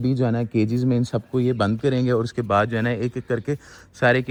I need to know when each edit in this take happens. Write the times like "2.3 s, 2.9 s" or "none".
none